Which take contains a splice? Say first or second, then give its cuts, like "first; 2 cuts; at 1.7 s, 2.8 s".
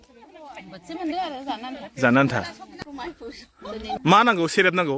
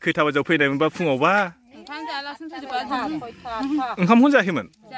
first; 1 cut; at 2.6 s